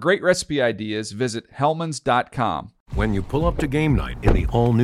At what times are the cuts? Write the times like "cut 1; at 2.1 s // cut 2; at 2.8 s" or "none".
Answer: cut 1; at 2.8 s